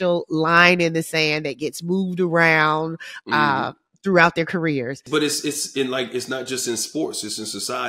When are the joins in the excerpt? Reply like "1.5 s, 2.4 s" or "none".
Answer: 5.0 s

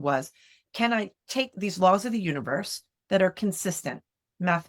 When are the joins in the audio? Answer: 1.5 s

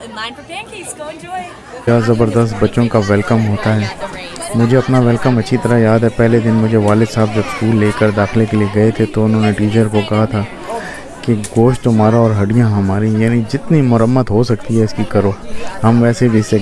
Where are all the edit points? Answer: 1.9 s

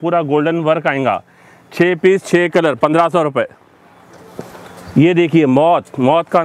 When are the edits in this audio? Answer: none

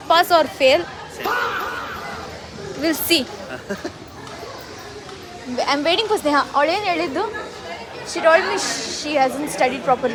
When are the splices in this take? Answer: none

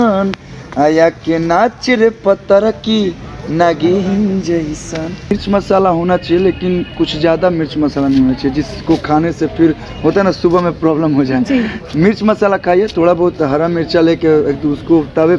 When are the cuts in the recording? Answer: 5.3 s

